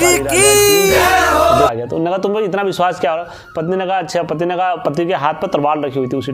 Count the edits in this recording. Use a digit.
1